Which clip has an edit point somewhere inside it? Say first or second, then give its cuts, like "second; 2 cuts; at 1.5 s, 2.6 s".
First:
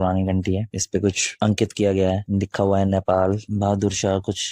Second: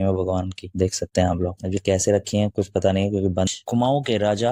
second; 1 cut; at 3.5 s